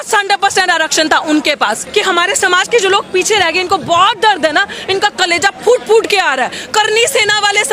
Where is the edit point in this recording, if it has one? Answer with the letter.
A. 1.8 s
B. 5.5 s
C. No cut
A